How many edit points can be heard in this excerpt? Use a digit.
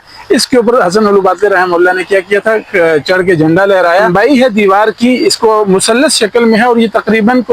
1